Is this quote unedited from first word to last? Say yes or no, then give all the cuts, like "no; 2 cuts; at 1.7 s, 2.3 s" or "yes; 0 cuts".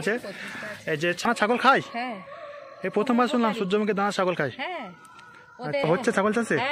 no; 2 cuts; at 1.2 s, 5.8 s